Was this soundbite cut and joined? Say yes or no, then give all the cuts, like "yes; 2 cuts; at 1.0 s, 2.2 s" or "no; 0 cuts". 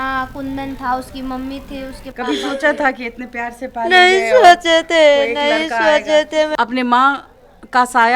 yes; 1 cut; at 6.5 s